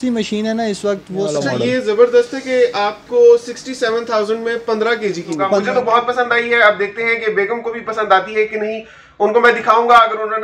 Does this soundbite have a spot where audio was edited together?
yes; 2 cuts; at 1.3 s, 5.5 s

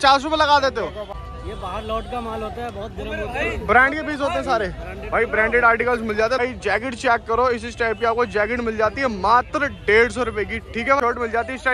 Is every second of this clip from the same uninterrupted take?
no; 3 cuts; at 1.2 s, 6.4 s, 11.0 s

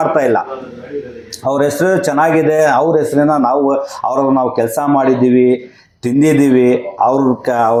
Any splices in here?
no; 0 cuts

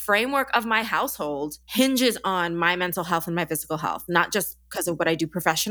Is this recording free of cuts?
yes; 0 cuts

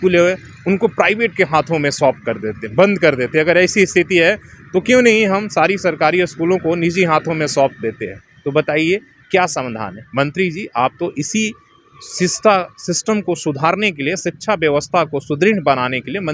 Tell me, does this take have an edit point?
no; 0 cuts

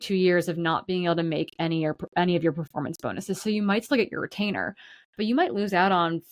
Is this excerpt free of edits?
yes; 0 cuts

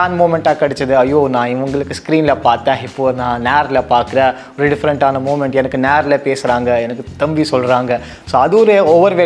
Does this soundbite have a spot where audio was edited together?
no; 0 cuts

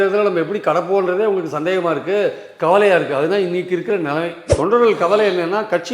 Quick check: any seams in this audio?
yes; 1 cut; at 4.4 s

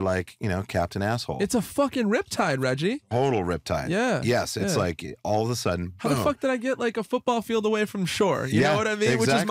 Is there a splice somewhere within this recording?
no; 0 cuts

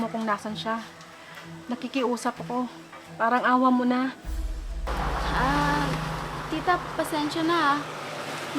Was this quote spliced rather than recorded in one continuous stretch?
no; 0 cuts

